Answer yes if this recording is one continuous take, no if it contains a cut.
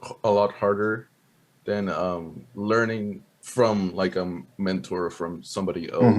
no